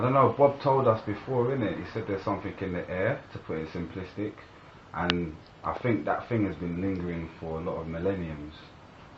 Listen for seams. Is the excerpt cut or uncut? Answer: cut